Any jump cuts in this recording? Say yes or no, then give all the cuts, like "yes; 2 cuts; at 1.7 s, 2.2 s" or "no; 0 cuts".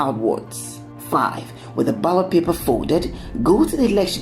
yes; 1 cut; at 3.2 s